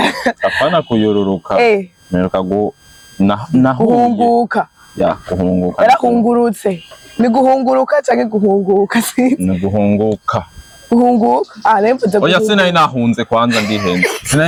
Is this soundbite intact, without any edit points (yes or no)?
yes